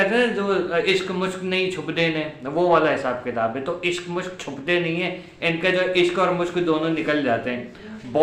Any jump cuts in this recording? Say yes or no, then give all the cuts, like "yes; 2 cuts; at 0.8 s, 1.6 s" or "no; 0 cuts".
no; 0 cuts